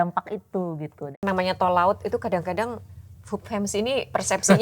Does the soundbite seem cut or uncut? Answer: cut